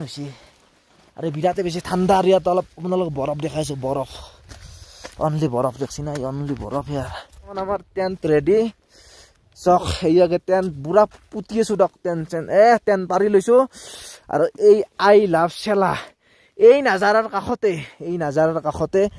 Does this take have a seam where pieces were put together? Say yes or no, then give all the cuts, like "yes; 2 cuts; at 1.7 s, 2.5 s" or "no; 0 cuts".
yes; 1 cut; at 7.5 s